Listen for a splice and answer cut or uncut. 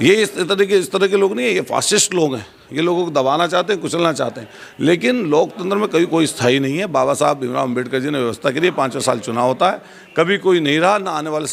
uncut